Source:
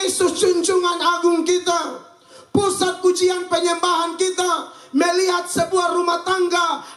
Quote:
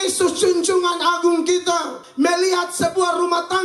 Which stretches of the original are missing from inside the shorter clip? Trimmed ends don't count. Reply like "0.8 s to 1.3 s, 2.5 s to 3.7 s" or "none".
2.0 s to 4.7 s